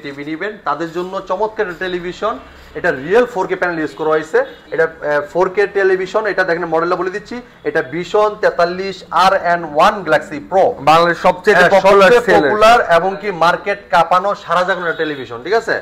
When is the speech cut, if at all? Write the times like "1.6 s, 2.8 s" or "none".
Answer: none